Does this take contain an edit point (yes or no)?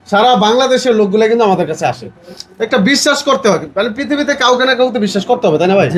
no